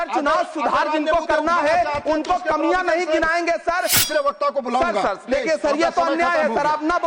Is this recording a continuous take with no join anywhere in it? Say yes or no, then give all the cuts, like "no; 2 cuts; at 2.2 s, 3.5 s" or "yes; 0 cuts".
no; 1 cut; at 4.0 s